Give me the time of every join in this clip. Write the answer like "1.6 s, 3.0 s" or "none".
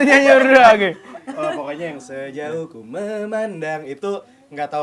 none